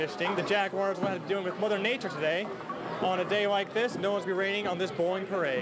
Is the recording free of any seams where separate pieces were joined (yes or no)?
yes